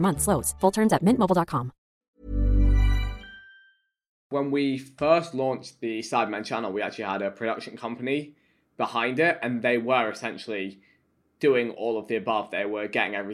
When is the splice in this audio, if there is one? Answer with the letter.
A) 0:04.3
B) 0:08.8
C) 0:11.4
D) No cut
A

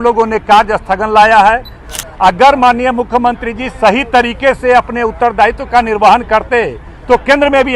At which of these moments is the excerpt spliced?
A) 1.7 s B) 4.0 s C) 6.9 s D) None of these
A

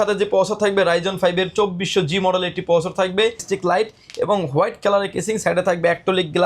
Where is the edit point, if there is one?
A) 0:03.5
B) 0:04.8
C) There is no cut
A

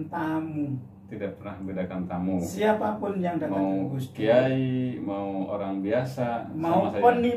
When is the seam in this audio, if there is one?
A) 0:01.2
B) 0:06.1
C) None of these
C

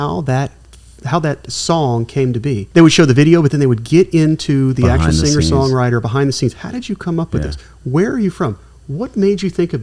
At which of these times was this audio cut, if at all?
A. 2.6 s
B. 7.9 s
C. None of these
A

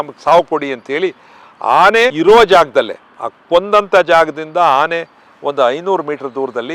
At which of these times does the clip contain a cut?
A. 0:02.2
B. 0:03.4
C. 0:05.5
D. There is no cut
A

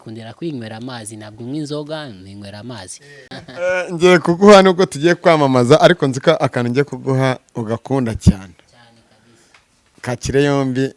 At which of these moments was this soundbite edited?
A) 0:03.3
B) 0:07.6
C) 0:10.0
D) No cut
A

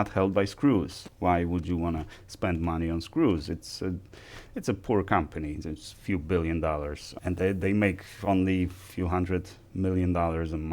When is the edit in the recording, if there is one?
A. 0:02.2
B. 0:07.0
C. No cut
B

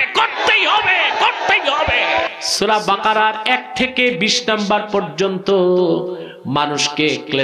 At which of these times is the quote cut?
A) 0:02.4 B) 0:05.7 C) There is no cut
A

